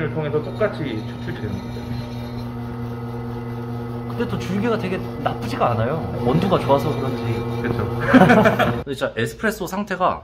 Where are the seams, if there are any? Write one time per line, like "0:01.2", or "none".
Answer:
0:03.9
0:08.8